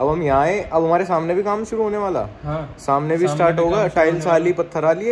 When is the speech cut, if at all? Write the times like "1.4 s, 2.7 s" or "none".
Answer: none

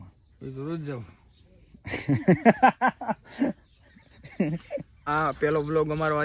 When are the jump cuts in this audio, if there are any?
5.0 s

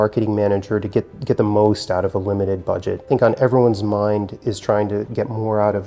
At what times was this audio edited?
3.1 s

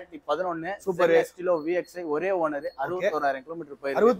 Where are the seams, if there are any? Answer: none

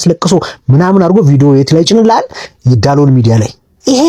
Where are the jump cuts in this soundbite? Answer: none

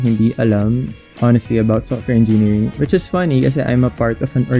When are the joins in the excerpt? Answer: none

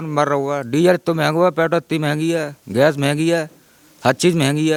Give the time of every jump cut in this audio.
none

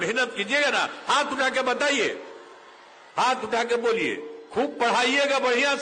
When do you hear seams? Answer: none

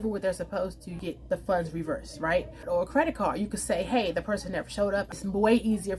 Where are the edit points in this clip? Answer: 1.0 s, 2.6 s, 5.1 s

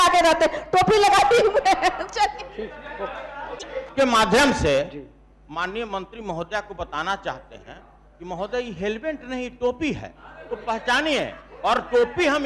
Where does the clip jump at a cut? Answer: 3.9 s

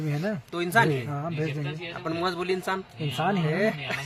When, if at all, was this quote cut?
none

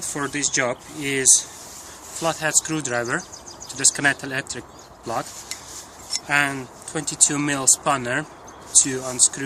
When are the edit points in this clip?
1.1 s

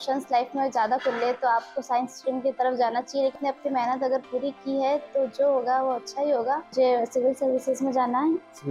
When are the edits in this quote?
3.3 s, 6.7 s

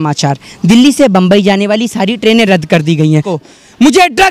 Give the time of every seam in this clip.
3.3 s

